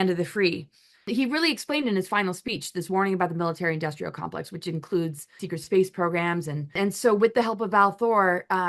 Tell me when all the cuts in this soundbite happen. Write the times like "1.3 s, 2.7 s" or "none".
1.1 s, 5.4 s, 6.8 s